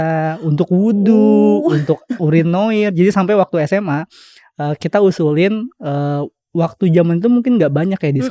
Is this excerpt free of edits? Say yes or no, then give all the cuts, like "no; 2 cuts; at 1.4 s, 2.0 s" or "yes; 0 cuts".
yes; 0 cuts